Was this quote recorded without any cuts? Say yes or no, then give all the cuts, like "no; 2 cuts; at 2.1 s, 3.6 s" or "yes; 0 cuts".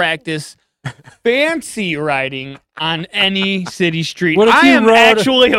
yes; 0 cuts